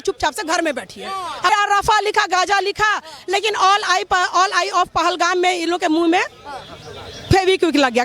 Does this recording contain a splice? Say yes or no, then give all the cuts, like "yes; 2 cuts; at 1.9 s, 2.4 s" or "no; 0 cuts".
yes; 1 cut; at 1.5 s